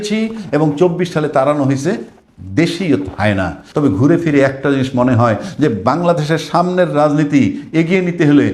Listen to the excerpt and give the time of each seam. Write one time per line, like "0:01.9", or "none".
0:03.6